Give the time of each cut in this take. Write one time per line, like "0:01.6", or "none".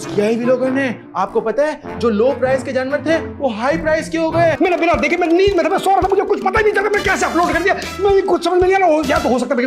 0:04.6